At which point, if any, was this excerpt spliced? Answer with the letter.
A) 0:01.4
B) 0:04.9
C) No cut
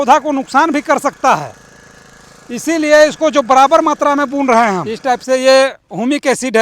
B